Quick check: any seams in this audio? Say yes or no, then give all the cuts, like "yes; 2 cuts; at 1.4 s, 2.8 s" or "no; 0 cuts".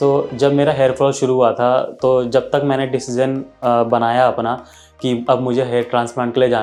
no; 0 cuts